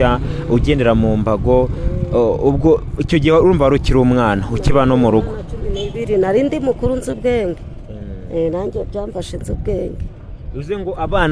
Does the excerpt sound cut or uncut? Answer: uncut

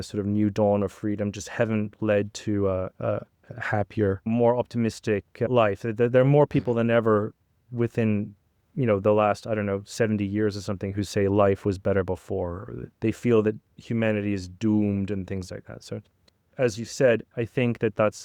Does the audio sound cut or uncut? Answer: cut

